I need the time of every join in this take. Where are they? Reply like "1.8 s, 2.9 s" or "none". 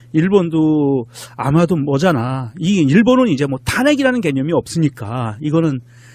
1.8 s